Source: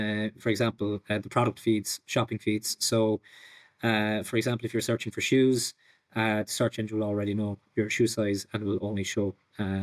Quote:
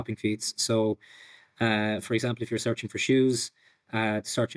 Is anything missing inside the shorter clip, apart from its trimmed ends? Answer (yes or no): no